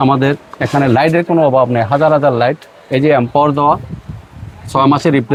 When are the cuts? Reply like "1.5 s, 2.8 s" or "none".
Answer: none